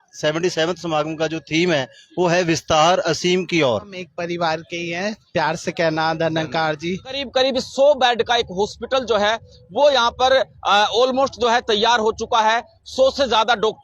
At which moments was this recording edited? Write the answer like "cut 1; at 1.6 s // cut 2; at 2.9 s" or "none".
cut 1; at 4.0 s // cut 2; at 7.2 s